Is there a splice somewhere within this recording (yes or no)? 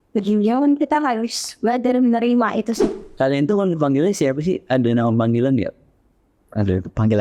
yes